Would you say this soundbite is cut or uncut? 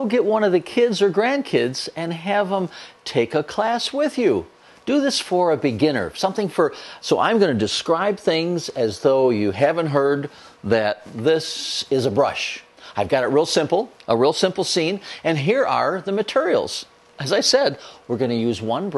cut